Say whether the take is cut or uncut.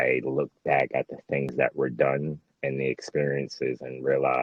uncut